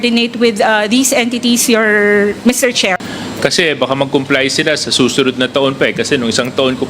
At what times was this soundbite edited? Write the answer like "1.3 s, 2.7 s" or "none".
3.2 s